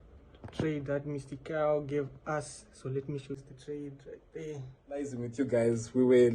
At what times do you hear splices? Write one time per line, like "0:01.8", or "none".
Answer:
0:03.4
0:05.2